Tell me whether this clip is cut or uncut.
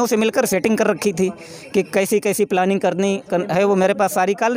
uncut